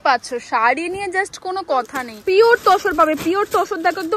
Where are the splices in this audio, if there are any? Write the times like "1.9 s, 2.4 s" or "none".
2.0 s